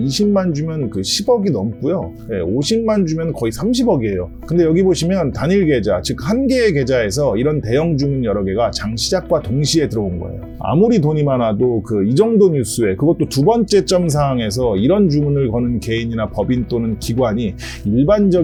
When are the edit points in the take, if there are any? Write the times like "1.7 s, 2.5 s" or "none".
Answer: none